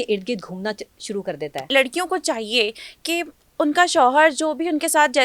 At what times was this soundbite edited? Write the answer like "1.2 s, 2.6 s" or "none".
1.6 s